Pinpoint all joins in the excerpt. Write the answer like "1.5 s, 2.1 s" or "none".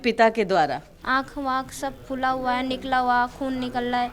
0.9 s